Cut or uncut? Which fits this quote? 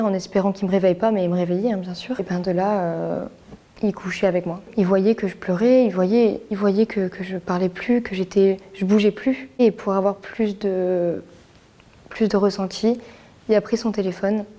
cut